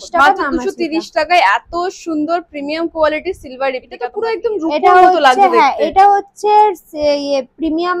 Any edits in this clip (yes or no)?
yes